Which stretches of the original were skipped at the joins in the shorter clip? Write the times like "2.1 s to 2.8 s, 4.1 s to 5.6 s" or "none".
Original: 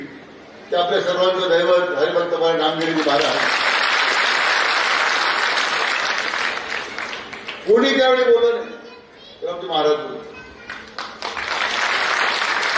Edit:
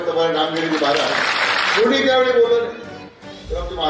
3.9 s to 7.6 s